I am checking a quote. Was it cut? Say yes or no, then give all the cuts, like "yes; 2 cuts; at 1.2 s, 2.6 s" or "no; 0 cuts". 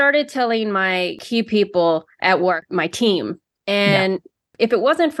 yes; 2 cuts; at 1.2 s, 2.1 s